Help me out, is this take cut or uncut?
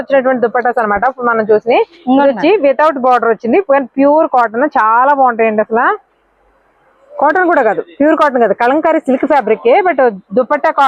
uncut